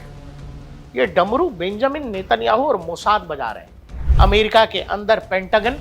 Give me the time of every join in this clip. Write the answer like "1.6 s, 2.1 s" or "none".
4.0 s